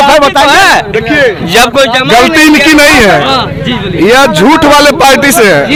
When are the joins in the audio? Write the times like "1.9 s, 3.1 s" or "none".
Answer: none

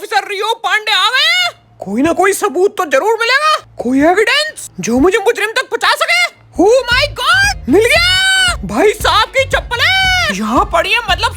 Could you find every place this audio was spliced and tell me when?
none

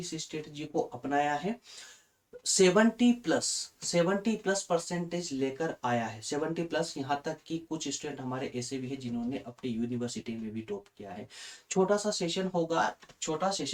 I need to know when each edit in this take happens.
none

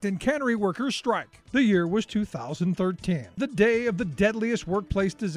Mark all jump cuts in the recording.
1.4 s

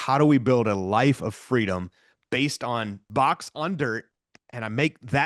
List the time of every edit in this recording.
3.0 s

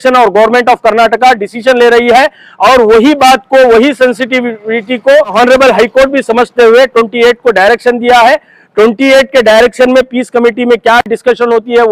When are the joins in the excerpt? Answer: 5.3 s

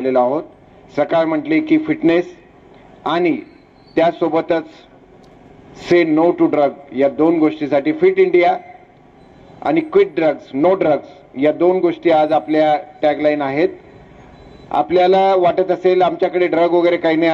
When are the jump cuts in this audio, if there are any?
none

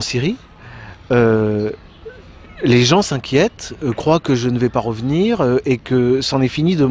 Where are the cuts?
5.2 s

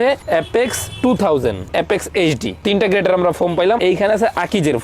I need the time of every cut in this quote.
1.7 s, 3.8 s

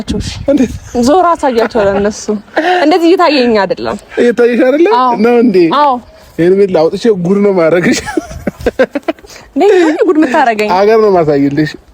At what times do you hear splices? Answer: none

